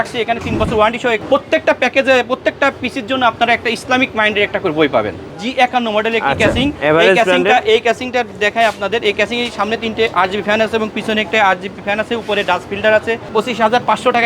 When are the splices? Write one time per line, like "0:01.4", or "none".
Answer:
0:01.2
0:05.4
0:13.2